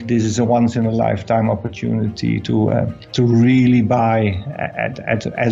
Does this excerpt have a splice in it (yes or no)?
yes